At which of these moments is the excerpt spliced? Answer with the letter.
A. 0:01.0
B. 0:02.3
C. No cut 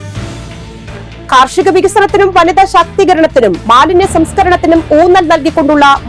C